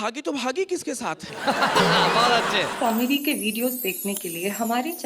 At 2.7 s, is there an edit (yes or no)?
yes